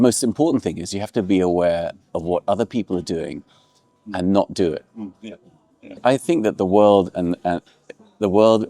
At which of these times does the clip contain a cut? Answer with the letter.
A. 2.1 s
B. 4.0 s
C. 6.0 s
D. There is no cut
C